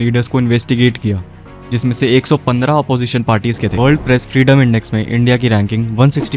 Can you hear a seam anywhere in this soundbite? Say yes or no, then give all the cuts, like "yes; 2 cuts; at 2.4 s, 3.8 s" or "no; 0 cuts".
yes; 1 cut; at 3.7 s